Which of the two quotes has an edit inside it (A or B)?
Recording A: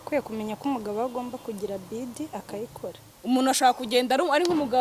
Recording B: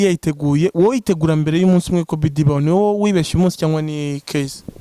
A